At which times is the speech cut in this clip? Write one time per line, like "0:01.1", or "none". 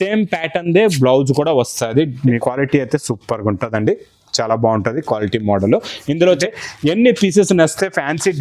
0:02.4
0:06.5